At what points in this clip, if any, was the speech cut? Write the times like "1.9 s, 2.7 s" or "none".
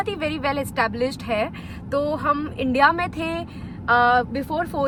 none